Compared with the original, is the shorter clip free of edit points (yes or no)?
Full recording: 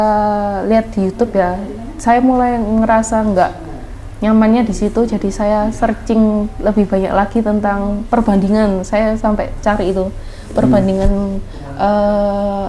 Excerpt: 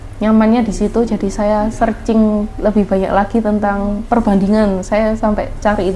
yes